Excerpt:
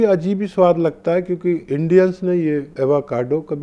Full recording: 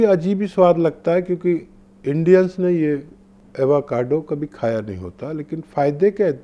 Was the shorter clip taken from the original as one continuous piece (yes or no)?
no